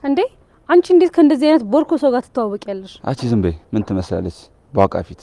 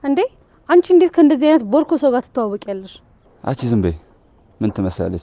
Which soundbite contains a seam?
first; 2 cuts; at 2.9 s, 4.0 s

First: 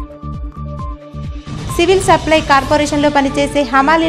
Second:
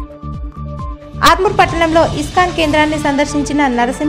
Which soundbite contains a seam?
second; 1 cut; at 0.9 s

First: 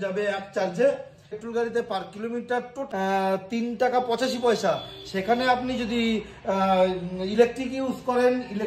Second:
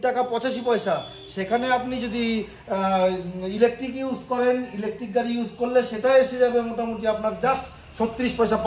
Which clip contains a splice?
first; 2 cuts; at 1.3 s, 2.8 s

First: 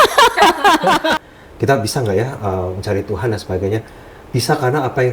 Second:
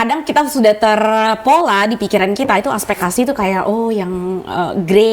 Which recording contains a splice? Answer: first; 1 cut; at 1.2 s

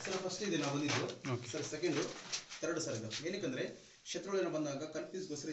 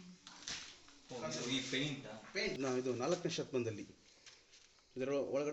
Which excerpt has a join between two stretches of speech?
second; 1 cut; at 2.6 s

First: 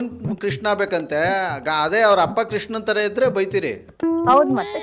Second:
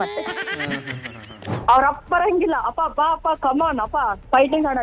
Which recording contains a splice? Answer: second; 1 cut; at 1.5 s

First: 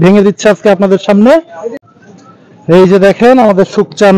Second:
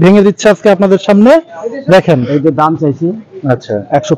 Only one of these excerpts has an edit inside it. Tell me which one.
first; 1 cut; at 1.8 s

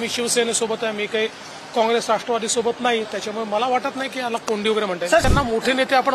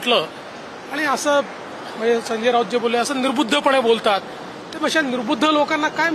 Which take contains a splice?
first; 1 cut; at 5.2 s

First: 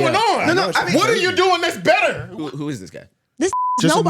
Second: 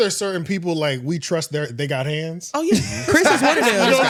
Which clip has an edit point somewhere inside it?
first; 1 cut; at 2.3 s

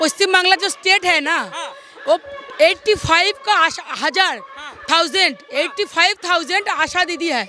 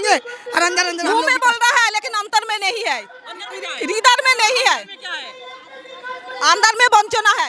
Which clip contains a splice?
second; 1 cut; at 1.0 s

